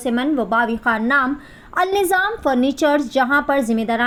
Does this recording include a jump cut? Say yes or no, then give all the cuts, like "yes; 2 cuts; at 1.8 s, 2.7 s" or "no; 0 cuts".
no; 0 cuts